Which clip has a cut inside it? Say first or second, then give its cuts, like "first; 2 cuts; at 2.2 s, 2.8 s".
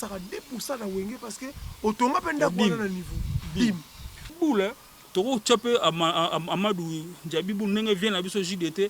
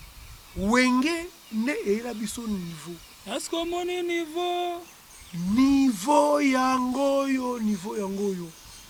first; 1 cut; at 4.3 s